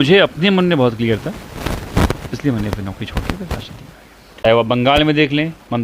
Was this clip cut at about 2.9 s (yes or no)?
no